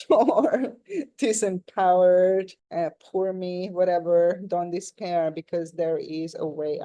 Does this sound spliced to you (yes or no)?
no